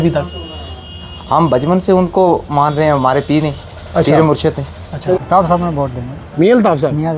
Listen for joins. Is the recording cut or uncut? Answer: cut